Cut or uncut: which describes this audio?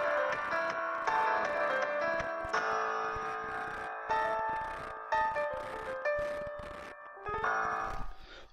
cut